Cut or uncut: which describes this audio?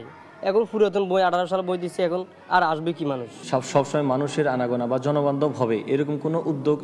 cut